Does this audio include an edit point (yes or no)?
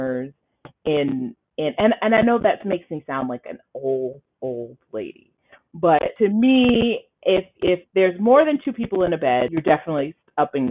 yes